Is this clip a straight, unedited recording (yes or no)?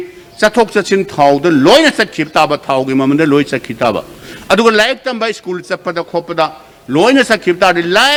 yes